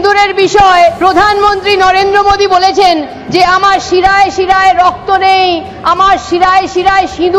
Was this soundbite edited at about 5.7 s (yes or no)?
no